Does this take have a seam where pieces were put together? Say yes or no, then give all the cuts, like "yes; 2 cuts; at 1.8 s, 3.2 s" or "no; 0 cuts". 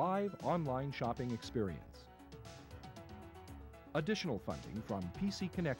yes; 2 cuts; at 2.1 s, 3.9 s